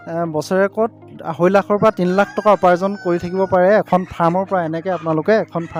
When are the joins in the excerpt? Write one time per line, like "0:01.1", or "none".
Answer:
none